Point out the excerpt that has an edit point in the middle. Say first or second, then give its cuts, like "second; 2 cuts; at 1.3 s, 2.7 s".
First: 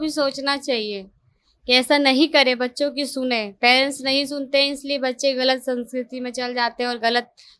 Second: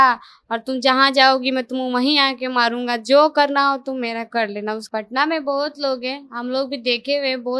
second; 1 cut; at 4.8 s